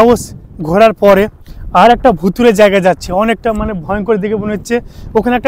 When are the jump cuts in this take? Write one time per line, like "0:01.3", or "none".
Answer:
none